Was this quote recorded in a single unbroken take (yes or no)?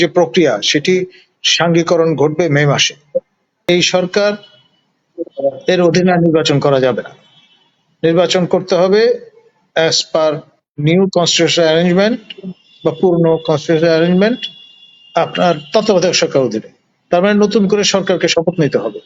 no